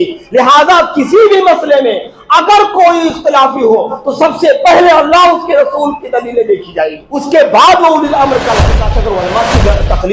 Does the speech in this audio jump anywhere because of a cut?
yes; 2 cuts; at 7.0 s, 8.9 s

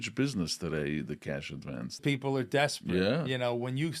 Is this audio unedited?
no; 1 cut; at 2.0 s

